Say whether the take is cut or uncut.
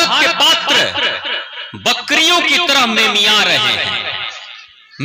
uncut